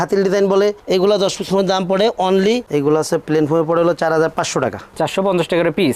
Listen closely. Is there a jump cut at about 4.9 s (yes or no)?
no